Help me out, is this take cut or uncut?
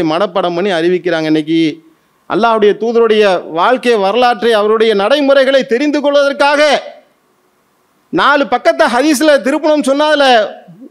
uncut